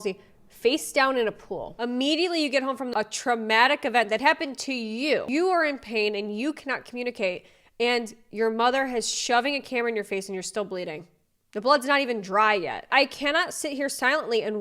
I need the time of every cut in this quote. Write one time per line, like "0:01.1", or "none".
0:01.7
0:02.9
0:05.3
0:12.8

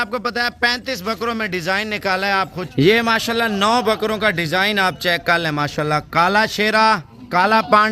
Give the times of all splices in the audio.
0:02.6

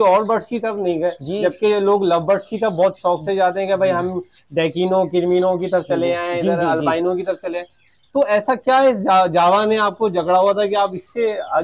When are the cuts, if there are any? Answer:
none

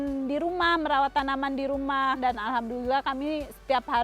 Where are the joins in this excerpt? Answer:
0:02.2

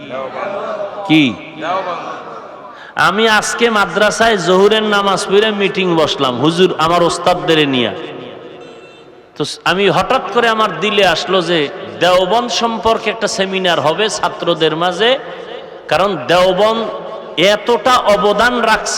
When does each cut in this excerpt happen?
0:08.8

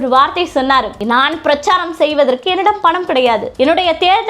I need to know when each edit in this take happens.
0:00.9
0:03.5

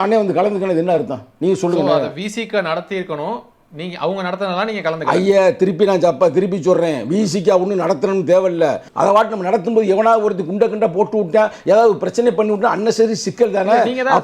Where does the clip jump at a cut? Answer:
0:08.9

